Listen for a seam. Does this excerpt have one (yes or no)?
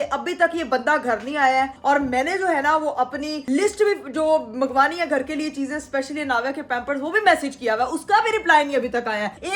no